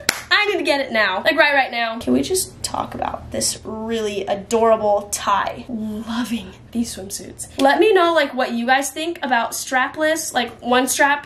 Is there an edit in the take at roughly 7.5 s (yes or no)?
yes